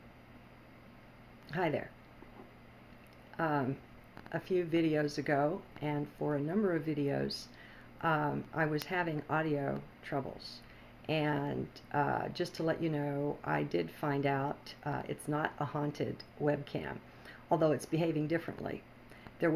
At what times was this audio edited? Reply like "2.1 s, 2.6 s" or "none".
none